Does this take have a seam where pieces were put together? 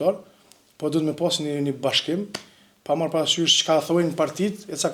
no; 0 cuts

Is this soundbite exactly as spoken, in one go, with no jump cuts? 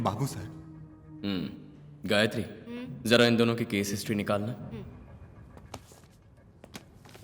yes; 0 cuts

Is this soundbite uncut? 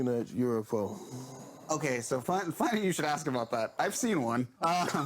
yes; 0 cuts

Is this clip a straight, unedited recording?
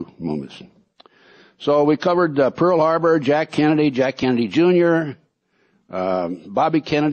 no; 1 cut; at 4.4 s

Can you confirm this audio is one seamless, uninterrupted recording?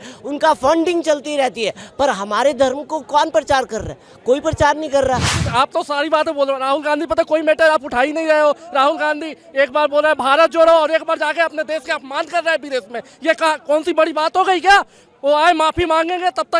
yes; 0 cuts

